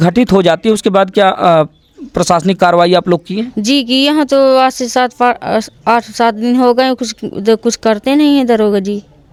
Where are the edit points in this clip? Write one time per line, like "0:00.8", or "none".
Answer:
none